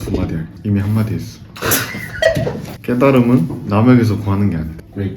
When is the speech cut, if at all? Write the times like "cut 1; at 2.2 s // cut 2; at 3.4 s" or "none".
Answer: cut 1; at 2.8 s